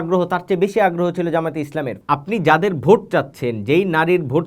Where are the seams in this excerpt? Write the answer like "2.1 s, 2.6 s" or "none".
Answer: 1.9 s